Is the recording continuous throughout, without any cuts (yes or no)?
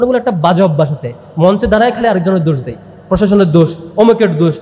yes